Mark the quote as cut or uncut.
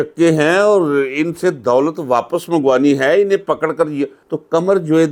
uncut